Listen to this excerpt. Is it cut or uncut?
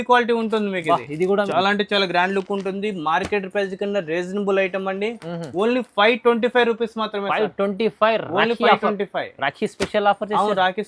cut